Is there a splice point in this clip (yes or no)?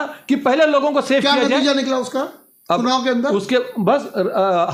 no